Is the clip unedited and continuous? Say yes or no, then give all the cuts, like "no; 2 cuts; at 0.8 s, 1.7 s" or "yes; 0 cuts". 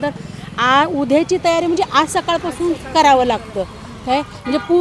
yes; 0 cuts